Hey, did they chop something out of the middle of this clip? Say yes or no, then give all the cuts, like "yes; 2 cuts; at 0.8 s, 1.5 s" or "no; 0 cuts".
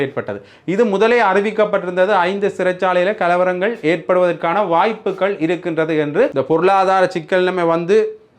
yes; 1 cut; at 6.3 s